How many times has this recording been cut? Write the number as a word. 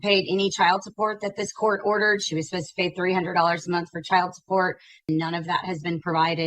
one